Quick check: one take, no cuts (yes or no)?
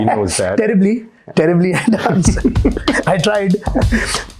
yes